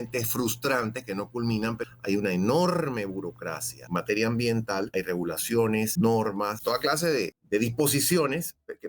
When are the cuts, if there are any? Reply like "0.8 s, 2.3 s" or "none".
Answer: 1.8 s, 3.7 s, 4.9 s, 5.9 s, 6.9 s